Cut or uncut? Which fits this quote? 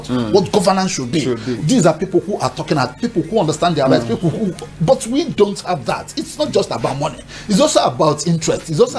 uncut